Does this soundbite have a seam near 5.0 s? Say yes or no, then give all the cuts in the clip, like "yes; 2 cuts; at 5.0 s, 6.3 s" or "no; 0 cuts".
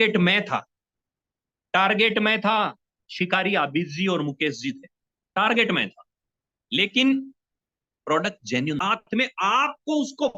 no; 1 cut; at 8.8 s